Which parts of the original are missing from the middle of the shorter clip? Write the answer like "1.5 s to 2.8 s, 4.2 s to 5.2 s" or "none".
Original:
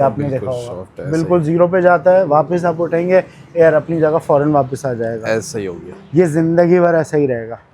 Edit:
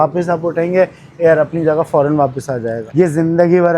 5.2 s to 6.0 s